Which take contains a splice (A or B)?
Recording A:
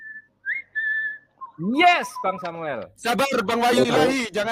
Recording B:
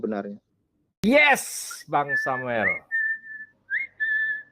B